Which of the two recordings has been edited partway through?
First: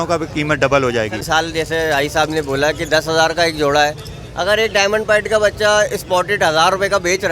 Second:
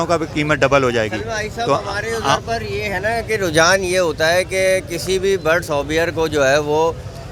first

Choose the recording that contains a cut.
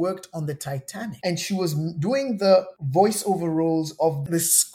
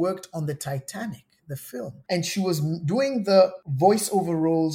first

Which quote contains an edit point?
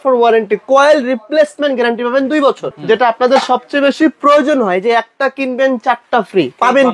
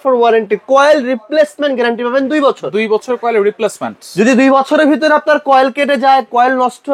first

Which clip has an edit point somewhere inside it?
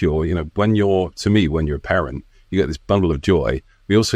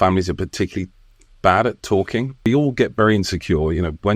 second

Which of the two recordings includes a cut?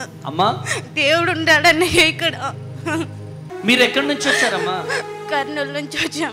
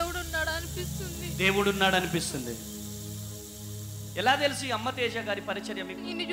first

